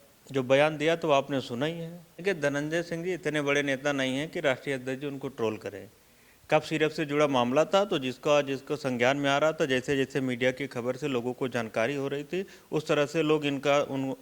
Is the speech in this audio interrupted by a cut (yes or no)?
yes